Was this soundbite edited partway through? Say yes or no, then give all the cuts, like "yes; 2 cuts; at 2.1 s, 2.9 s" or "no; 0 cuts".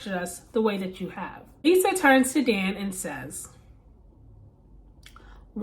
yes; 1 cut; at 1.6 s